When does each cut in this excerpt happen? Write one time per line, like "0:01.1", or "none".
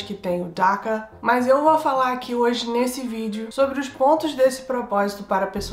0:01.1